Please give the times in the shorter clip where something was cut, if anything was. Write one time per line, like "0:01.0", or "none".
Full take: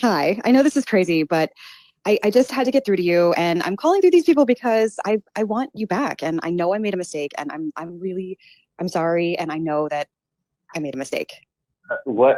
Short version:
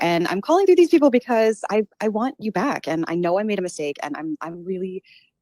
none